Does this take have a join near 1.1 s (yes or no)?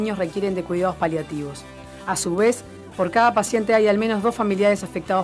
yes